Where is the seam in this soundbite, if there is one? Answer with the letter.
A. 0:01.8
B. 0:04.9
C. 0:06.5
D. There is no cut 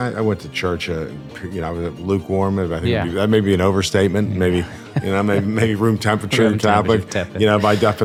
D